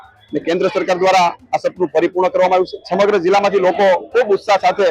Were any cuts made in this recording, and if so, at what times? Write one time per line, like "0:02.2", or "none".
0:02.8